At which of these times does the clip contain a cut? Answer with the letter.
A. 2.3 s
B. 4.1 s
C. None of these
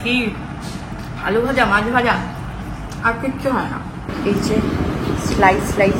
B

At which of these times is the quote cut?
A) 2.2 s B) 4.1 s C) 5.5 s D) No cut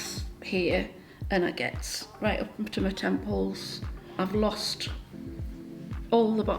B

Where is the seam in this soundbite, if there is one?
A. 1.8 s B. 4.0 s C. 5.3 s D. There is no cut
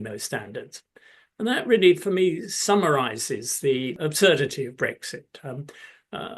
B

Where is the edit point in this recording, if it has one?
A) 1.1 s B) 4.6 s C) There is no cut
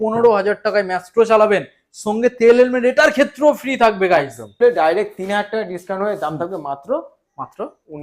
B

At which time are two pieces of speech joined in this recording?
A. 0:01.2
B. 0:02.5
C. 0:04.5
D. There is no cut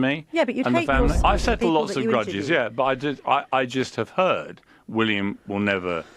A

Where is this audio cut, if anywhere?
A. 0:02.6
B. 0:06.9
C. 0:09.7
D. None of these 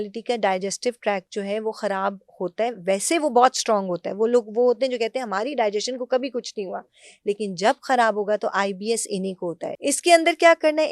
C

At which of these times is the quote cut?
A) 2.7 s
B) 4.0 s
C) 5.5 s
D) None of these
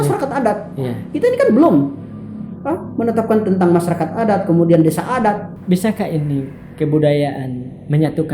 C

